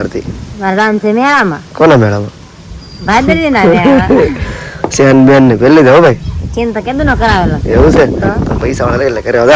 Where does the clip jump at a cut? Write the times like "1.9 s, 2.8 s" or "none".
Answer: none